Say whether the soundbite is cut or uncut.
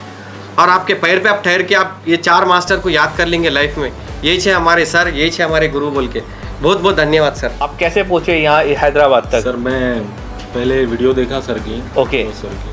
cut